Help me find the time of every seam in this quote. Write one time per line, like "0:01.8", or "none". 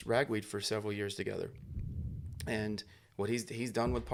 none